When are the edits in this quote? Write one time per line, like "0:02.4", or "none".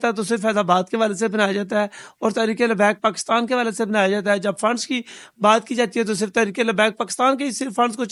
none